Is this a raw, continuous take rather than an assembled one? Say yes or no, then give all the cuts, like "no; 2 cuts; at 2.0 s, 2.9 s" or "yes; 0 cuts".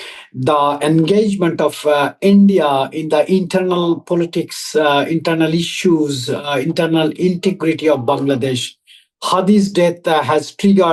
yes; 0 cuts